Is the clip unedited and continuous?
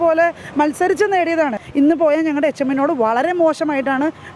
no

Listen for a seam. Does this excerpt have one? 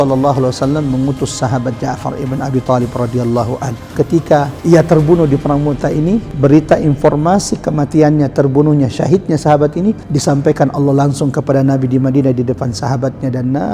yes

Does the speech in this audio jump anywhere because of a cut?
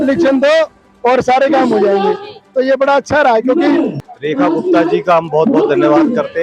yes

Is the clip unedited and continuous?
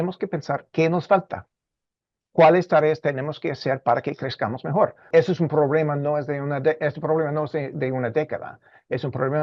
no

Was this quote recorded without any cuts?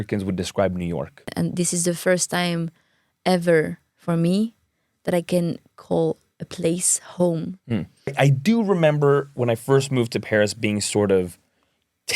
no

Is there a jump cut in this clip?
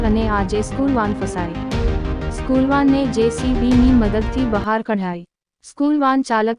yes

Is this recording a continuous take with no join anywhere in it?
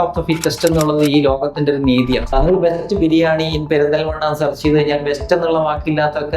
no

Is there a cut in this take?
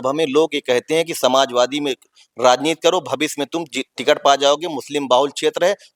no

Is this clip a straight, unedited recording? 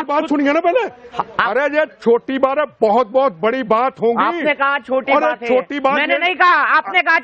yes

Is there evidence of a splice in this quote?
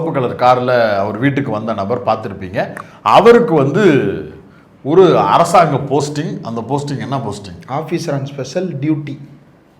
no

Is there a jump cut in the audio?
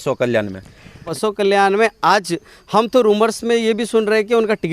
yes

